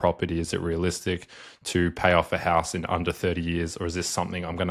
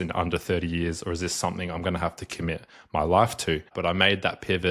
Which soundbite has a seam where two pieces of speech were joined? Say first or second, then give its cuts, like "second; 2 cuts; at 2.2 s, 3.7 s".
second; 1 cut; at 3.7 s